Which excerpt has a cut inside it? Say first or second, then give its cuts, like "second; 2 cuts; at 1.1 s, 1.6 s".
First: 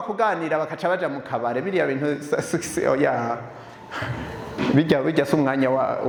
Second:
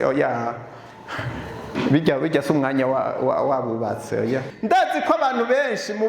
second; 1 cut; at 4.5 s